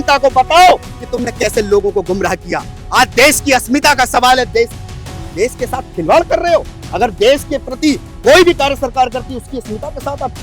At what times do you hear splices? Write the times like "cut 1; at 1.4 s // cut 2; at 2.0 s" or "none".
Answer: none